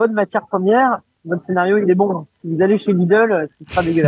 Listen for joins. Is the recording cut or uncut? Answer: uncut